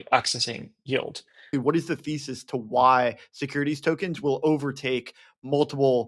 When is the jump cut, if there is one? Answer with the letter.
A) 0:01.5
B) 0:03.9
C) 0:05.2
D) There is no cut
A